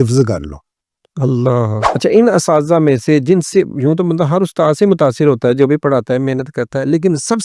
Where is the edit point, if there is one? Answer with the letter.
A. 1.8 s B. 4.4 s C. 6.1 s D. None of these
A